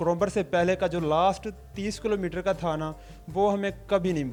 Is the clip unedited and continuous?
yes; 0 cuts

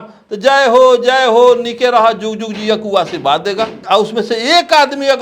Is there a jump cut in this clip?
yes; 1 cut; at 3.8 s

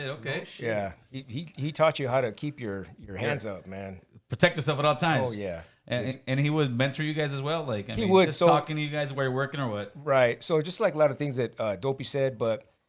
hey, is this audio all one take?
yes; 0 cuts

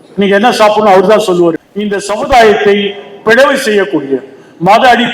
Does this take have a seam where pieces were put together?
yes; 1 cut; at 1.7 s

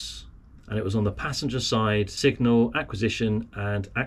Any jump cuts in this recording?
yes; 1 cut; at 2.1 s

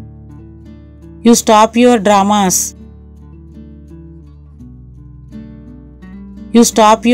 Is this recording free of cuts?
yes; 0 cuts

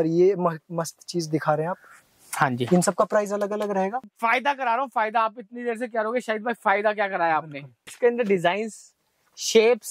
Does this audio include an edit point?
yes; 2 cuts; at 4.1 s, 7.9 s

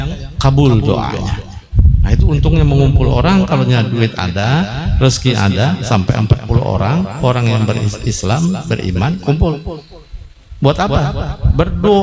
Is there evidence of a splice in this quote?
no; 0 cuts

